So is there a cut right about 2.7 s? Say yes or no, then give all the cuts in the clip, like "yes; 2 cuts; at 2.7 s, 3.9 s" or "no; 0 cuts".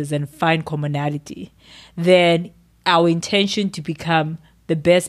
no; 0 cuts